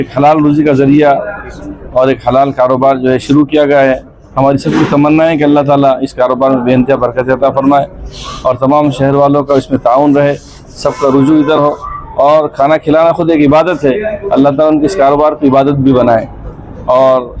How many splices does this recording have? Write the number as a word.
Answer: zero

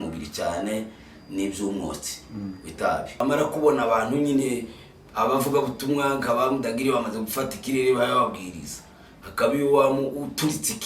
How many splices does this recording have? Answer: one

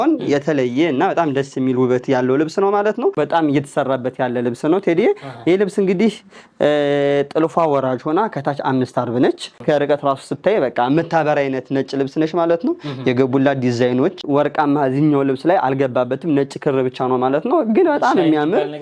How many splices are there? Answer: three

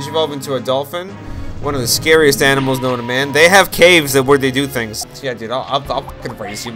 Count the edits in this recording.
one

